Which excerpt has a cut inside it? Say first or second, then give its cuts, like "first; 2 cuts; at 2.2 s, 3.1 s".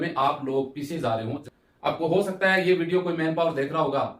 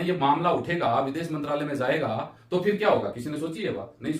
first; 1 cut; at 1.4 s